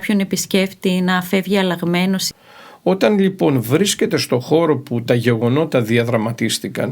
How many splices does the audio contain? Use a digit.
1